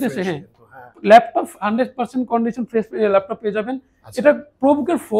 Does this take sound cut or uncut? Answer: uncut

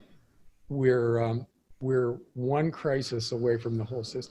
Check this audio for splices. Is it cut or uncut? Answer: uncut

